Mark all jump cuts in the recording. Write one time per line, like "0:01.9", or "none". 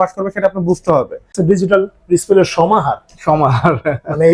0:01.4